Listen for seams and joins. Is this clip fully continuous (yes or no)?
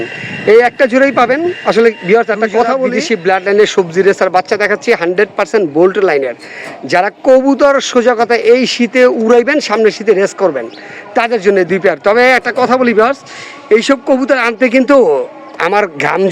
no